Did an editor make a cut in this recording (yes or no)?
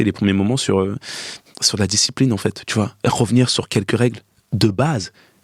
no